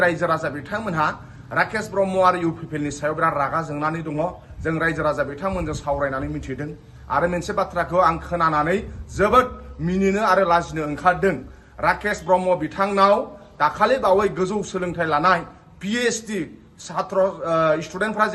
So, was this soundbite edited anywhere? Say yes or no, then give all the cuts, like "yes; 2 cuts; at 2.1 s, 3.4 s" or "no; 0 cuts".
no; 0 cuts